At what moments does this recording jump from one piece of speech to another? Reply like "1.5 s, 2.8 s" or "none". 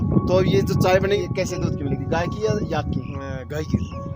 1.2 s